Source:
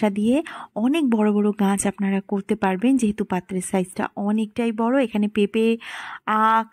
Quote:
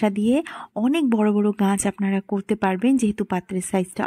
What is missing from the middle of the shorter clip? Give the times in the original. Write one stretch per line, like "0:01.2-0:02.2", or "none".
none